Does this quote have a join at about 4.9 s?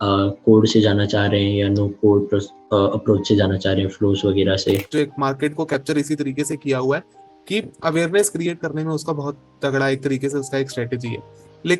yes; 1 cut; at 4.9 s

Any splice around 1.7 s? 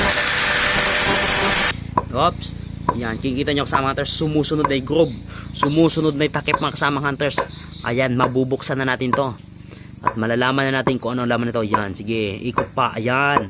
yes; 1 cut; at 1.7 s

